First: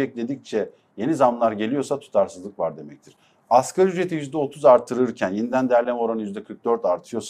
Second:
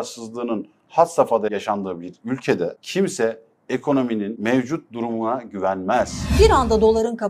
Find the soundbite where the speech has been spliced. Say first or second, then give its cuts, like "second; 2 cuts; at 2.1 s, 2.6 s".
second; 4 cuts; at 1.5 s, 2.8 s, 4.3 s, 6.3 s